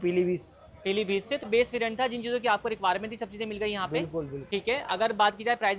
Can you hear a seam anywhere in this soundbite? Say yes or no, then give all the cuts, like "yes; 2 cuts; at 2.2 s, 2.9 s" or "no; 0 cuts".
yes; 2 cuts; at 1.5 s, 4.4 s